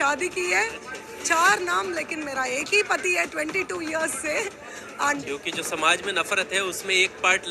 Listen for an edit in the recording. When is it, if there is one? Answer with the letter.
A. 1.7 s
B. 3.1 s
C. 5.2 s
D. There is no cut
C